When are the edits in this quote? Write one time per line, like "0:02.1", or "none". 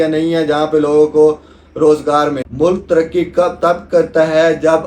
0:02.4